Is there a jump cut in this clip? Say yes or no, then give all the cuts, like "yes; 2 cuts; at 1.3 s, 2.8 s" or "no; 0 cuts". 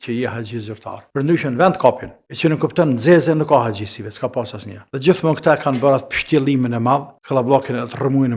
no; 0 cuts